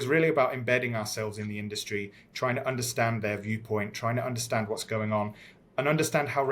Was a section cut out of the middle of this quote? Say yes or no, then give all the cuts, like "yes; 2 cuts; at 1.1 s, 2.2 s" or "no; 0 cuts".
no; 0 cuts